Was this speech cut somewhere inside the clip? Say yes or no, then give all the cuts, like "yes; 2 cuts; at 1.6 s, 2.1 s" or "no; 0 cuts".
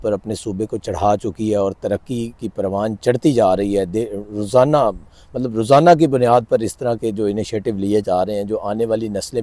no; 0 cuts